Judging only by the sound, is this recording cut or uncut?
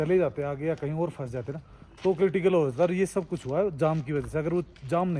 uncut